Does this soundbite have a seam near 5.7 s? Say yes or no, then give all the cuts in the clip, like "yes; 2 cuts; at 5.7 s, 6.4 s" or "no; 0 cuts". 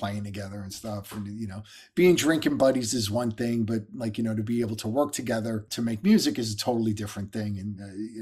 yes; 1 cut; at 5.7 s